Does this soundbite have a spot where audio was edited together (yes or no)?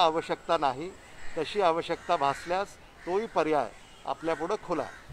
no